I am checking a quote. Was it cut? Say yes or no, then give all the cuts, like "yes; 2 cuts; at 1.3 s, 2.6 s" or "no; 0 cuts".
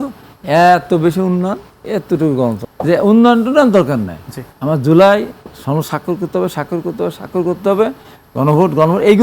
yes; 1 cut; at 2.6 s